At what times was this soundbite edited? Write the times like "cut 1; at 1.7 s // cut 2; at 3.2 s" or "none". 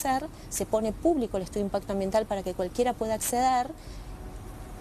none

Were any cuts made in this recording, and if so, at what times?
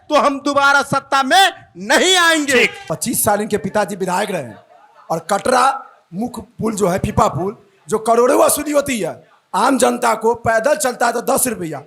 cut 1; at 2.8 s

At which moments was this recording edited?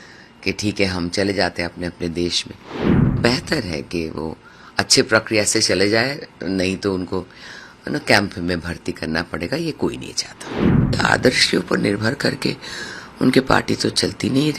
cut 1; at 10.9 s

